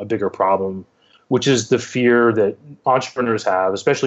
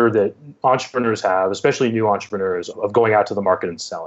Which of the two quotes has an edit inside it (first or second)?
second